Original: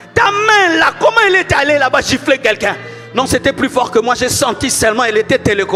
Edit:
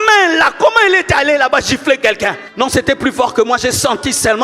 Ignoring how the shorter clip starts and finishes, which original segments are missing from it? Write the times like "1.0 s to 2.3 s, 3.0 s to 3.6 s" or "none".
2.8 s to 3.0 s